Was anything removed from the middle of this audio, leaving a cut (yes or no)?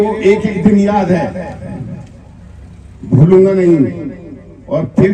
no